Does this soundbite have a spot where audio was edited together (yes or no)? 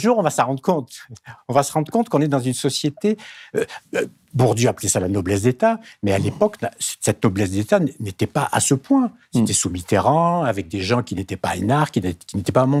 no